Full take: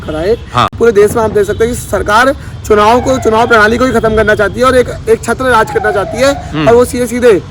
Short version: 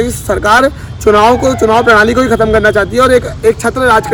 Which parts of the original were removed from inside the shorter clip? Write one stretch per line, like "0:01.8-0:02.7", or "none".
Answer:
none